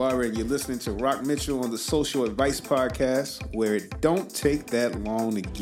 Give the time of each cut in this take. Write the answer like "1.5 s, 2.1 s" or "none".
none